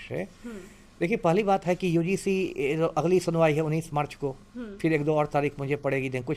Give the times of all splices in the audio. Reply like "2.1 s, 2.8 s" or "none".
none